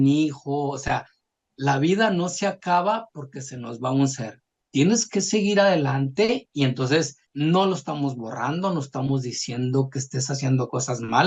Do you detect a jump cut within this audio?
yes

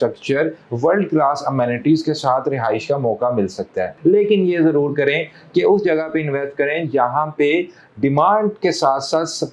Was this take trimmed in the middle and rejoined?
yes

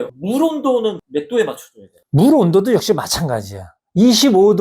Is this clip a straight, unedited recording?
no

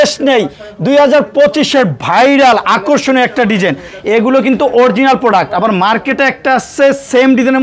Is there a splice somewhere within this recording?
no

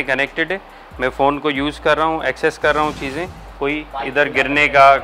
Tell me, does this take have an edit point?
no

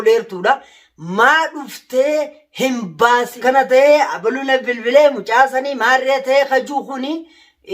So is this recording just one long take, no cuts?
no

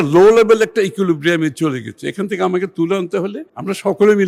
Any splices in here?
no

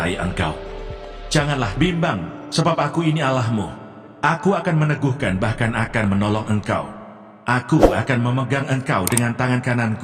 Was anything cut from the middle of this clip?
no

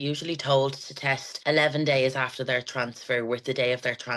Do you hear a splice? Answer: yes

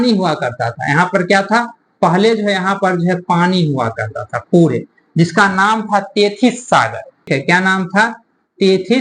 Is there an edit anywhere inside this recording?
yes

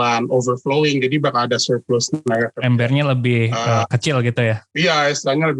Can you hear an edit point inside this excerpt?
no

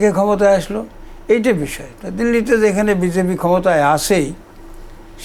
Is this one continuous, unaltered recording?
yes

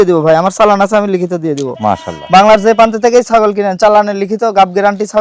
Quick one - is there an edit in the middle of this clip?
no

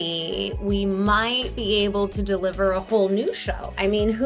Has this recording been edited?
no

